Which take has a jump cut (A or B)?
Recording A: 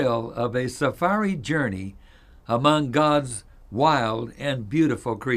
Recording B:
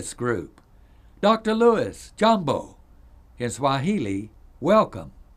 B